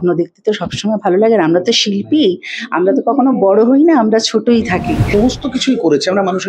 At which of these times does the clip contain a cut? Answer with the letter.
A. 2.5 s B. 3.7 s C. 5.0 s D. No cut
C